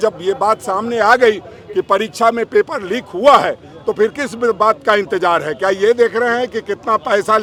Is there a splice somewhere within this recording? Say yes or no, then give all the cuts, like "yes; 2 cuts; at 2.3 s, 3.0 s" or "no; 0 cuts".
no; 0 cuts